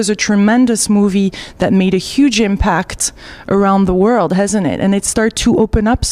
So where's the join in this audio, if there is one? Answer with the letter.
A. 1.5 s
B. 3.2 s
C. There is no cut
A